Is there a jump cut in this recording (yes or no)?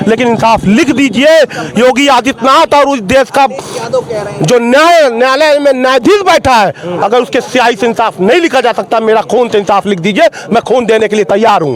no